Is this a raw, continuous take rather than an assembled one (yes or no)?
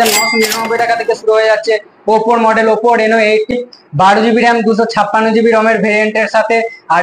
no